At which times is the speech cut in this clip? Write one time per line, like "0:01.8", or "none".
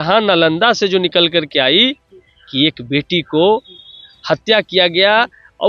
none

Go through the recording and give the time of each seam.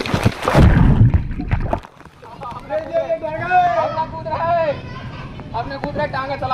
0:02.5

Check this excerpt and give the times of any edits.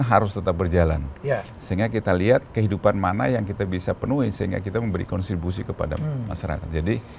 none

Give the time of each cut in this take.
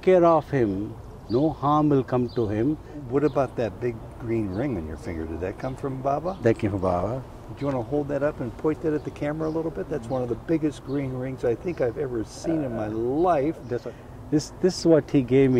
0:02.9
0:13.7

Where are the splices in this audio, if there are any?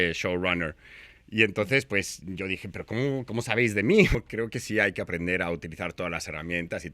0:04.2

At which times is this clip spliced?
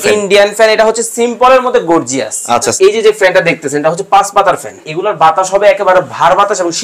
0:02.7
0:04.9

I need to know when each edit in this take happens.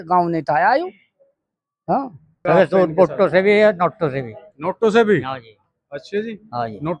0:02.4

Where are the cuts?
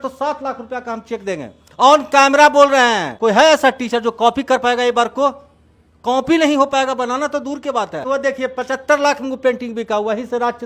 0:03.1
0:08.0

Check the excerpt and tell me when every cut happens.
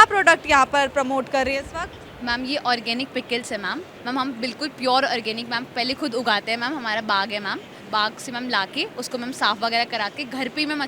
0:03.9
0:07.8

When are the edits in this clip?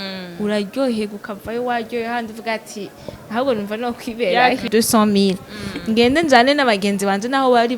0:04.7

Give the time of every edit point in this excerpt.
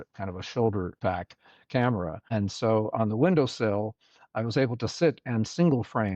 0:00.9
0:02.2

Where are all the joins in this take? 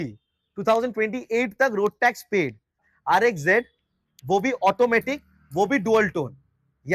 0:02.9

